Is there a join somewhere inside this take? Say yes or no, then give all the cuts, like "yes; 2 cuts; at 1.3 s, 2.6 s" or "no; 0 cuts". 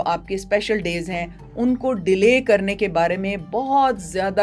no; 0 cuts